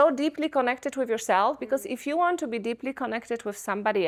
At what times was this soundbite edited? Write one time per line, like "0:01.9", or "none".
none